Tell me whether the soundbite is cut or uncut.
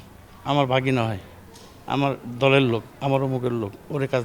uncut